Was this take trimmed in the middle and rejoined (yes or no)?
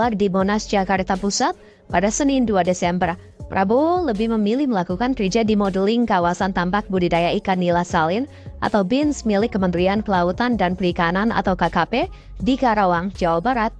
no